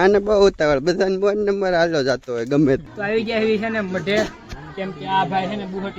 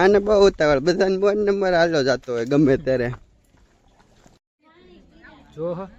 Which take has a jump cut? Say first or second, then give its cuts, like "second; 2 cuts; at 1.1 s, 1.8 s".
first; 1 cut; at 2.8 s